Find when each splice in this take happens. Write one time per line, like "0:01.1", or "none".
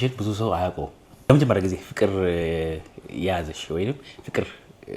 0:01.3